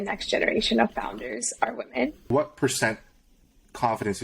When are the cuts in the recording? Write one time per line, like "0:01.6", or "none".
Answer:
0:02.3